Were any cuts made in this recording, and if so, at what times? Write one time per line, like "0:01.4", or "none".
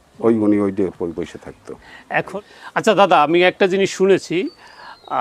0:02.3